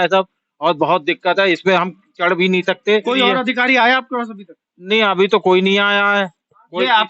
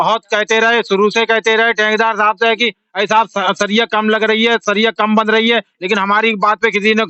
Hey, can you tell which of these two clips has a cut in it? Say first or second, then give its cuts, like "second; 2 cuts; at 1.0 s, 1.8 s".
first; 1 cut; at 3.1 s